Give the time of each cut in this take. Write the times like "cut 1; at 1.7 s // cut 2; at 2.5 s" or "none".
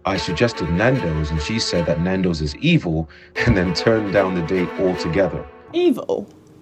cut 1; at 5.5 s